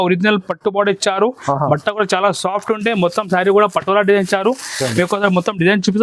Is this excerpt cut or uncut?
uncut